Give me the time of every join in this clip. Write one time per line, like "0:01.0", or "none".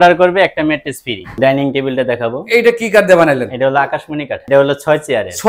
0:01.2
0:04.4